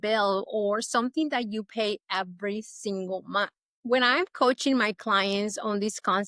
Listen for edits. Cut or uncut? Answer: cut